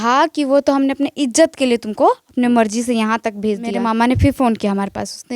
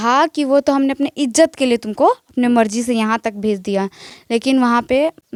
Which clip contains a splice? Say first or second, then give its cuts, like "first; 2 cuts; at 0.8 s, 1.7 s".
first; 1 cut; at 3.7 s